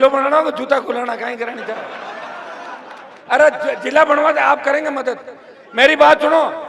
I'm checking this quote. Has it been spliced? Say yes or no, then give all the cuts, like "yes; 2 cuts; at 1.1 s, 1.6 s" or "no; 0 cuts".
yes; 1 cut; at 3.1 s